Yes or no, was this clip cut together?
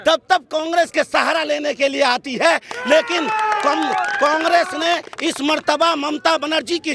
no